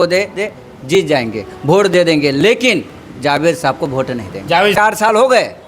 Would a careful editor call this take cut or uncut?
cut